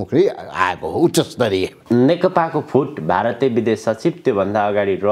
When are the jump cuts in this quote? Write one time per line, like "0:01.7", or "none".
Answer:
0:01.8